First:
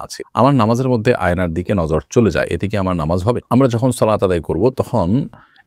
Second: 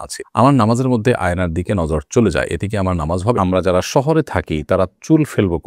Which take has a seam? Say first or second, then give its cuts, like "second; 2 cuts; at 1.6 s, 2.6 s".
second; 1 cut; at 3.4 s